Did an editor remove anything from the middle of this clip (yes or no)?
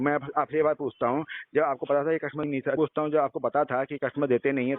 yes